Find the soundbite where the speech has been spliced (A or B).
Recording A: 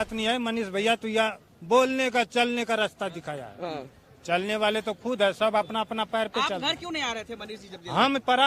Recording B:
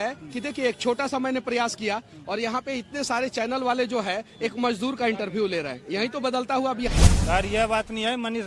B